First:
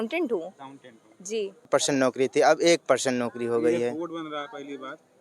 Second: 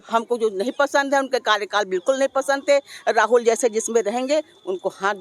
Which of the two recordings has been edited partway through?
first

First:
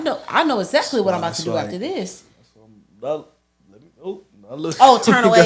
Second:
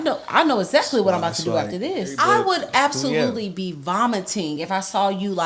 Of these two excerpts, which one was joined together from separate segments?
second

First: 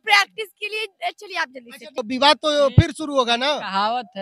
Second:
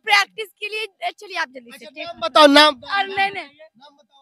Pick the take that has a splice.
first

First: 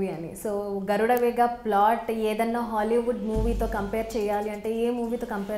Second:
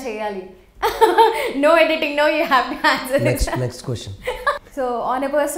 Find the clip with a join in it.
second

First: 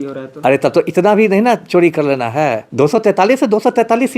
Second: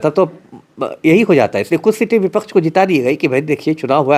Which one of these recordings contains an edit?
first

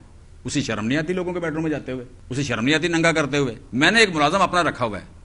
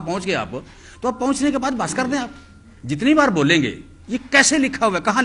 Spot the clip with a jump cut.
first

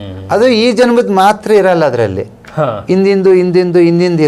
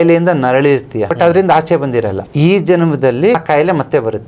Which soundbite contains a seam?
second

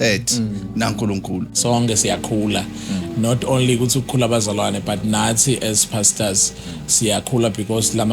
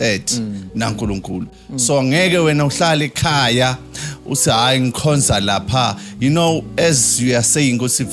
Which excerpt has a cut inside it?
first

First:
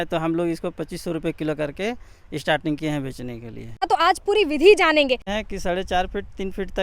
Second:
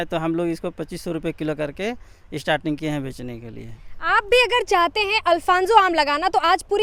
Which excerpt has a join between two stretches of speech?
first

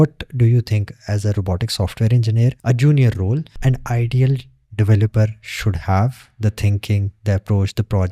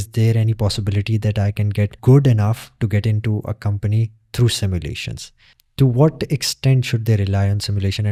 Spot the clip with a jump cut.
first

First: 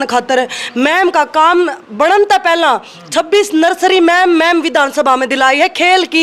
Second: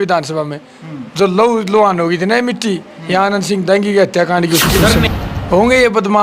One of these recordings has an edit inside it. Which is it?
second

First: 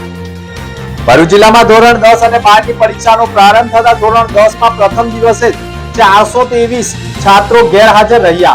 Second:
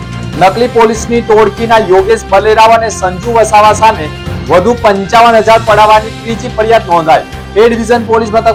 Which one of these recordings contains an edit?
first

